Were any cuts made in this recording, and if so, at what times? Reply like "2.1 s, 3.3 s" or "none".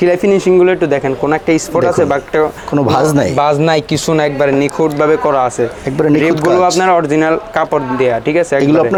none